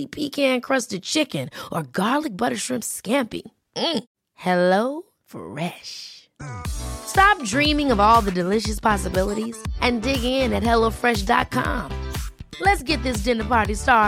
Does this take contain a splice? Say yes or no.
no